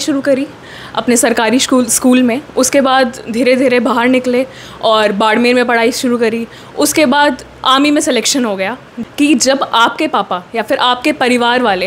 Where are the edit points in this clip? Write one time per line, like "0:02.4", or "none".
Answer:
0:08.9